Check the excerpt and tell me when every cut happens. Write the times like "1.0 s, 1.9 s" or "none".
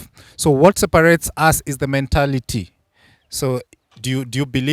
none